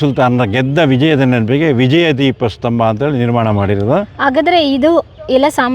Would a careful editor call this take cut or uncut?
uncut